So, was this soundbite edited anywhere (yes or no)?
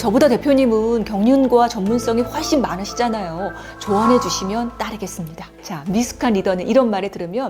no